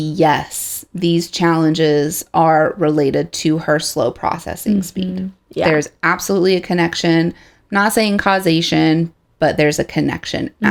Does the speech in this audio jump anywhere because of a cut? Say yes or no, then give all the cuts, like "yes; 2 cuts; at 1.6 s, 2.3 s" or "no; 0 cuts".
no; 0 cuts